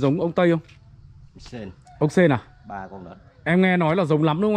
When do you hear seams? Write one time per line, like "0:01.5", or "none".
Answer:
none